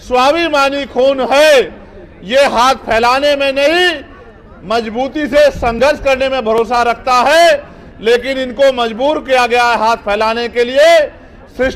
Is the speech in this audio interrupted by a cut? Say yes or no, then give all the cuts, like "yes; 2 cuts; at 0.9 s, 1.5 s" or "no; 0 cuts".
no; 0 cuts